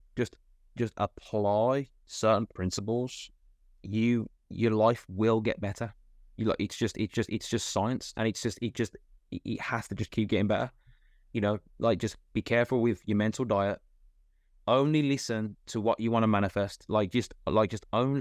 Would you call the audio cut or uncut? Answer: cut